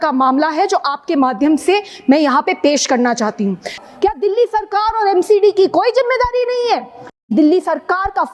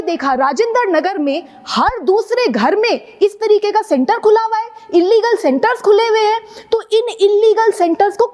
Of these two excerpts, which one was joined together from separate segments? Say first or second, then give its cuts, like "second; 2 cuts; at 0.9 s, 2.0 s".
first; 2 cuts; at 3.8 s, 7.3 s